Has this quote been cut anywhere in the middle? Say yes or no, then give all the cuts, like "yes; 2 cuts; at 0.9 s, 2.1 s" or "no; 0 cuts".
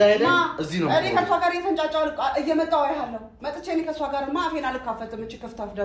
no; 0 cuts